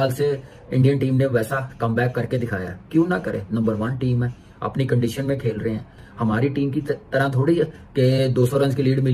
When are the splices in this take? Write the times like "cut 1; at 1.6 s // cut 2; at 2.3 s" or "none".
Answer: none